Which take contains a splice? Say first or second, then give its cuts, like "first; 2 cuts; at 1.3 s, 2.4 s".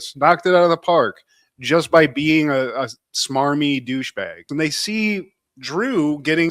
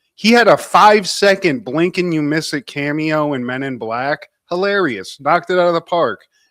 first; 1 cut; at 4.5 s